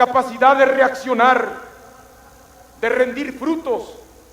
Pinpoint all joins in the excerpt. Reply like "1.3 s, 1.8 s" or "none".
none